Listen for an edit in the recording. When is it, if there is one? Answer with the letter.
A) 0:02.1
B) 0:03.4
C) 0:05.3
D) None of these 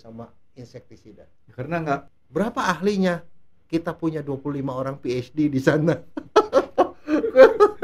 A